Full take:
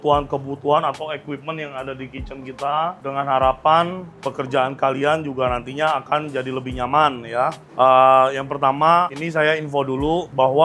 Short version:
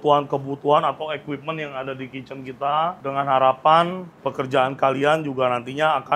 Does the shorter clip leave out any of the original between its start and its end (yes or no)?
no